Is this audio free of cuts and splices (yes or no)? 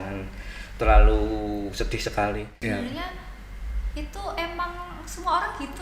no